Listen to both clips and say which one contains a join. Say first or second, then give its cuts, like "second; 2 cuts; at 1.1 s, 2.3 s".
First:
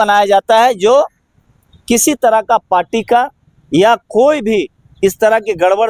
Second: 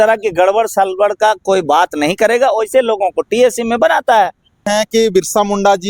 second; 1 cut; at 4.7 s